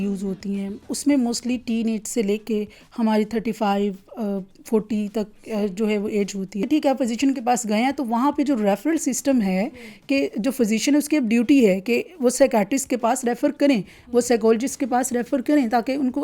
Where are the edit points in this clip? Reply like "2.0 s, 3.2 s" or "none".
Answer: 6.6 s